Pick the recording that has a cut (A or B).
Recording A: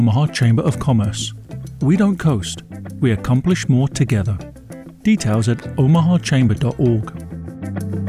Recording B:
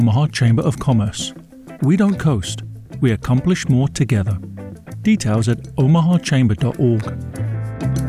A